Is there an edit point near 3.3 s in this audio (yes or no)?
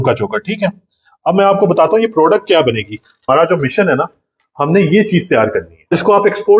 yes